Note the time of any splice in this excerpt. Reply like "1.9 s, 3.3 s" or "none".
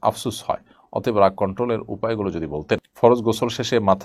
2.9 s